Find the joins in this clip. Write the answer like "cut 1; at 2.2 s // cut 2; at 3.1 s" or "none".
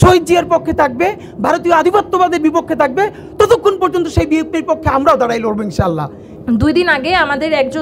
cut 1; at 6.3 s